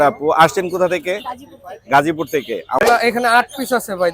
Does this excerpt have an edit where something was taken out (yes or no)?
yes